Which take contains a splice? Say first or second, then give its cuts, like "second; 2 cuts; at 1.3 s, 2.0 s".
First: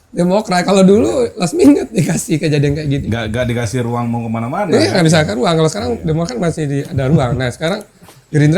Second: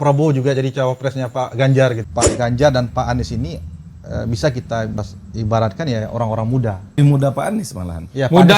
second; 3 cuts; at 2.0 s, 5.1 s, 7.0 s